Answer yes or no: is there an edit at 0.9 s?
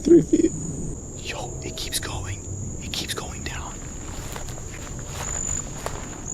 yes